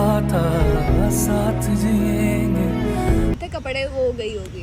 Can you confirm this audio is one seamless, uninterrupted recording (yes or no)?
no